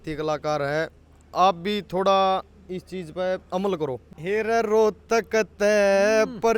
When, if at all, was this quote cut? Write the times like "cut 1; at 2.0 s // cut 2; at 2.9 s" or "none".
cut 1; at 4.1 s